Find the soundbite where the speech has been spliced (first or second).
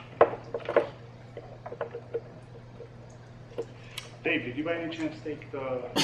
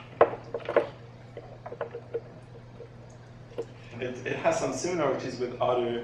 first